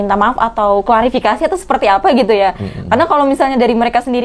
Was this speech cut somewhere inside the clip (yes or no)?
no